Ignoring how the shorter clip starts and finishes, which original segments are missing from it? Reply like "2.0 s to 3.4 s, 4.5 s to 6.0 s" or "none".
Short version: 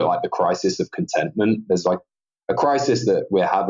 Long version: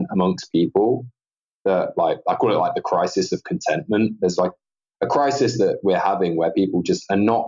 none